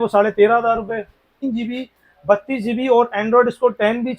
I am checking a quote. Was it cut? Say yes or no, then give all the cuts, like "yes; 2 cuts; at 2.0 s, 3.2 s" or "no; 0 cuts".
yes; 1 cut; at 1.4 s